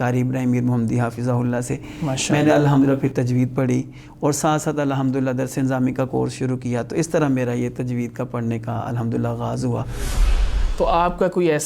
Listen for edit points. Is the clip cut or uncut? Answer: cut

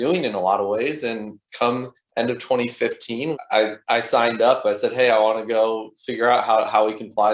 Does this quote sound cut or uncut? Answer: cut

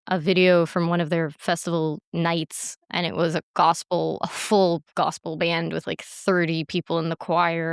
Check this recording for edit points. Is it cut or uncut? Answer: cut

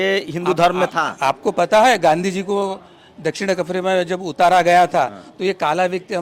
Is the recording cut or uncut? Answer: uncut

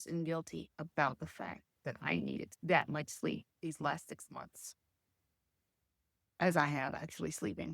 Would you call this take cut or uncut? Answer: cut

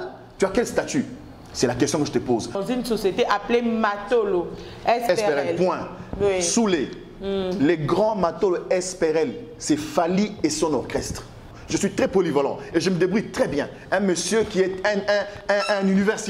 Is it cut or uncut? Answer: cut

